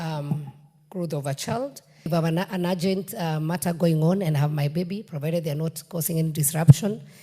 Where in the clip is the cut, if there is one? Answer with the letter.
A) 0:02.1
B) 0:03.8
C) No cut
A